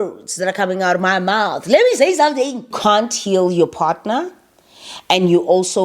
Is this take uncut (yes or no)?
no